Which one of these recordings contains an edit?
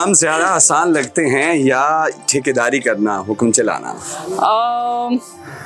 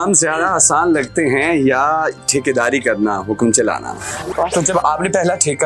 second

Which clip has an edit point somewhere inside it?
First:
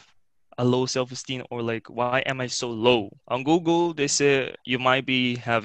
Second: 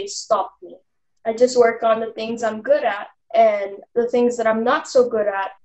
first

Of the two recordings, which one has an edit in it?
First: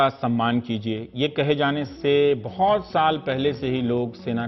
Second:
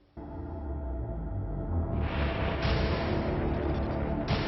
second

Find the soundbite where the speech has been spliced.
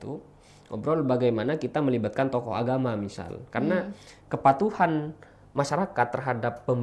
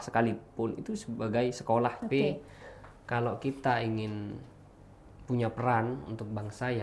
second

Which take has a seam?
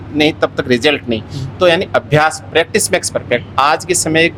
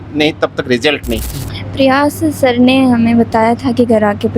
second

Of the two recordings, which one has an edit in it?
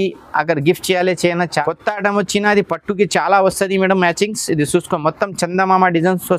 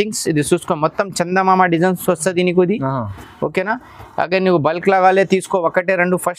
first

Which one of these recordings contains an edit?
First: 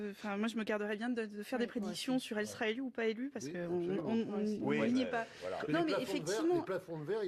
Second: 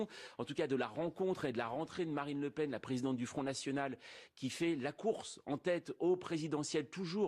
second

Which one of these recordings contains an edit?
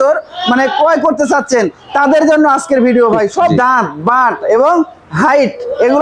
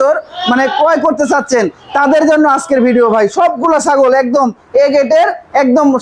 first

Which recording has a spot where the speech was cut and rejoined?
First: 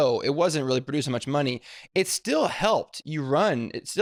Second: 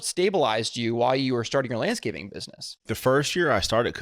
second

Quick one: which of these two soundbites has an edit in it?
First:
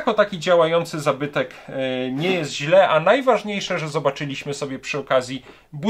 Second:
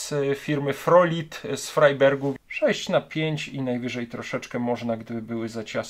second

